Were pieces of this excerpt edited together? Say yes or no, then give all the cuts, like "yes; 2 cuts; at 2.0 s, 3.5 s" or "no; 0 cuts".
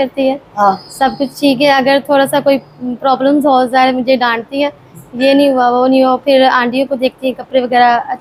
no; 0 cuts